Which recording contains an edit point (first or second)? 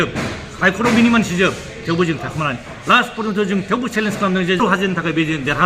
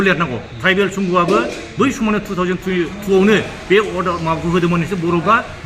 first